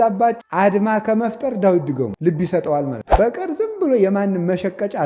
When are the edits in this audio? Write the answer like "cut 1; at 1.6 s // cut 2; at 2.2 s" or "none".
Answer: cut 1; at 3.1 s